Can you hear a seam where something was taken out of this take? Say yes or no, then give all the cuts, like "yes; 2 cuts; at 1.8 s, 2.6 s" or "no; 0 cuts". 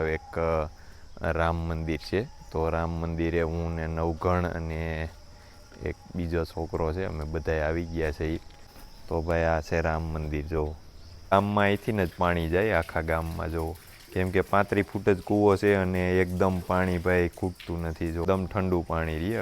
yes; 2 cuts; at 11.3 s, 18.2 s